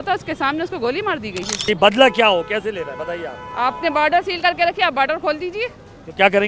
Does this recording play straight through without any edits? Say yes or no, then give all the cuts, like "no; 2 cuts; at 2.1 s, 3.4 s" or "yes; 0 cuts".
no; 1 cut; at 1.6 s